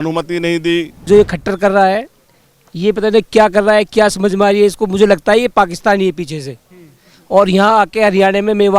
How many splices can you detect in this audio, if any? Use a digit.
1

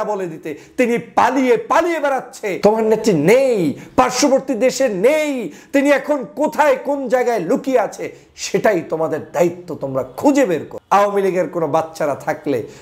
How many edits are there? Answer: 2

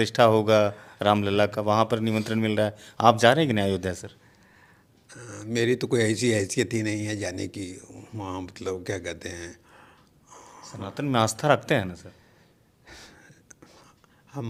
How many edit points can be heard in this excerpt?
0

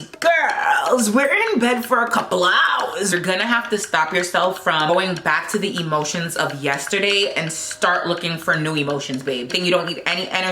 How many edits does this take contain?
3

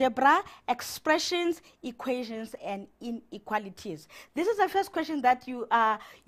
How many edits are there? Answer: 0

